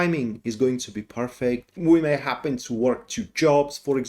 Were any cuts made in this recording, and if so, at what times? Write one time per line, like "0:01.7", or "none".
0:01.7